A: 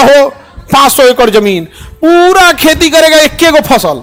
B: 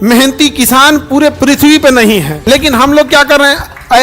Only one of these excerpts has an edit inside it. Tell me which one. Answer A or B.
B